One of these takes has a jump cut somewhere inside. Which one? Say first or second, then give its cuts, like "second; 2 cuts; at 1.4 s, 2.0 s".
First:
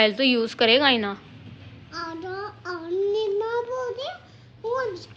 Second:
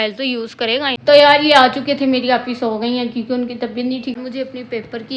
second; 2 cuts; at 1.0 s, 4.2 s